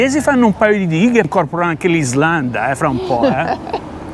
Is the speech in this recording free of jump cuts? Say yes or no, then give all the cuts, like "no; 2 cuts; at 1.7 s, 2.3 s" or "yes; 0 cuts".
yes; 0 cuts